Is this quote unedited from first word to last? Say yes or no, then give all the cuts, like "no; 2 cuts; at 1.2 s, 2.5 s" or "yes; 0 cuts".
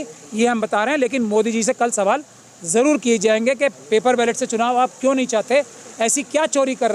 yes; 0 cuts